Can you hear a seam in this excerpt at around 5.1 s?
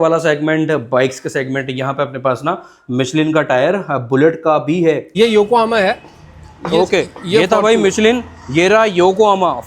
yes; 1 cut; at 5.1 s

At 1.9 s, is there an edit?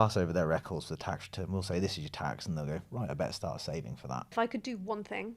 no; 1 cut; at 4.3 s

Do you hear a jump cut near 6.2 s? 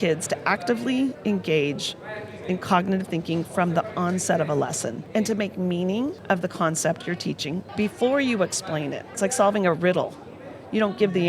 yes; 4 cuts; at 5.0 s, 6.2 s, 7.7 s, 9.1 s

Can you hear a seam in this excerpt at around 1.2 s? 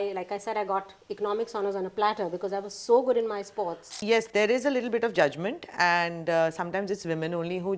no; 1 cut; at 4.0 s

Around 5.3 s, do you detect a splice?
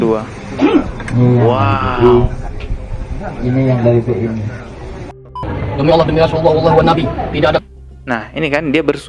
yes; 1 cut; at 5.3 s

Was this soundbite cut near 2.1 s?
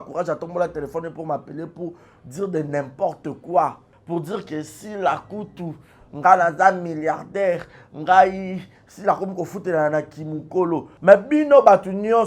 no; 2 cuts; at 3.9 s, 10.9 s

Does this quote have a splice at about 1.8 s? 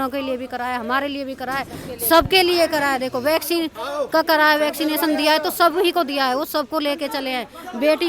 no; 0 cuts

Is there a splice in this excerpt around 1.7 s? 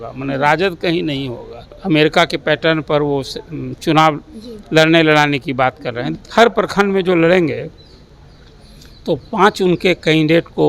yes; 2 cuts; at 1.7 s, 6.1 s

